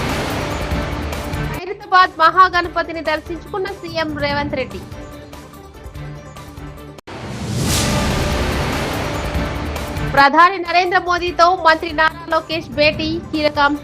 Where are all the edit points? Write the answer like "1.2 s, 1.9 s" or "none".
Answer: 1.3 s